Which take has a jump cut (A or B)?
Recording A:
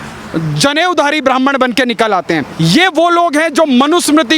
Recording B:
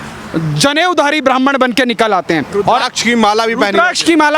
A